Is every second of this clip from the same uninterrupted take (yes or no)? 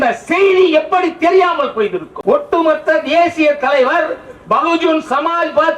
no